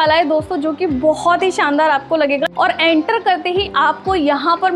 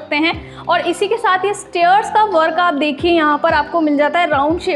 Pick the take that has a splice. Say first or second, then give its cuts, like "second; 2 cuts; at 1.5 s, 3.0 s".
first; 1 cut; at 2.5 s